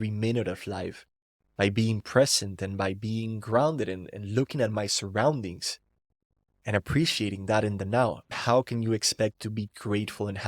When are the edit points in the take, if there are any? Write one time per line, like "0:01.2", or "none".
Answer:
0:08.4